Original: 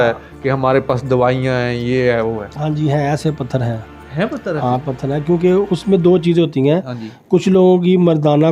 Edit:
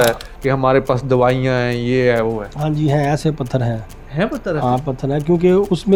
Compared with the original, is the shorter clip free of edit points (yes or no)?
yes